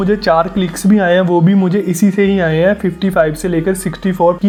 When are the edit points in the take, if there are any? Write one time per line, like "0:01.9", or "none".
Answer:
none